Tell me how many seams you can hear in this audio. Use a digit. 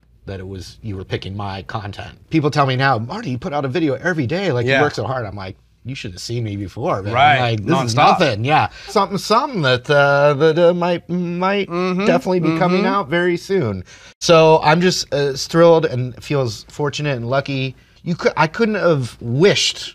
3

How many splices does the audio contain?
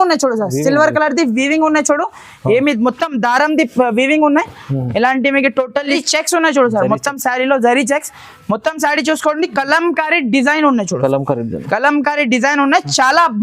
1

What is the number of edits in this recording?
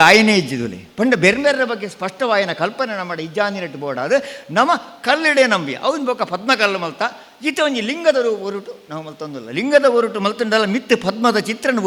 0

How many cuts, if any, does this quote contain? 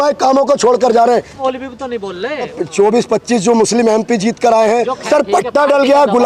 3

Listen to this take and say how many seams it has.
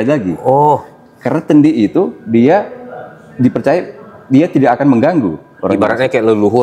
0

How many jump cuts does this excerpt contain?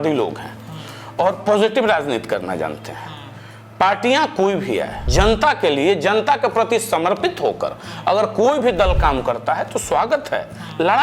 1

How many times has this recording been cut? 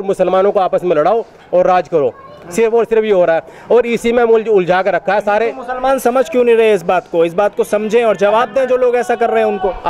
0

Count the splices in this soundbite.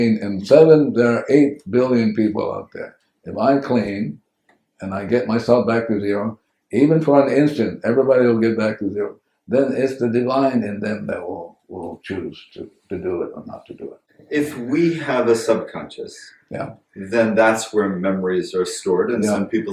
1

